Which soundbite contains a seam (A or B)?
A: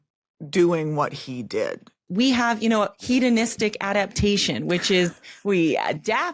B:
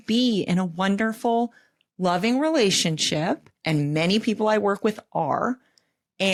A